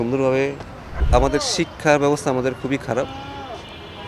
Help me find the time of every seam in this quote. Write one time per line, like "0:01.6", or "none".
0:01.0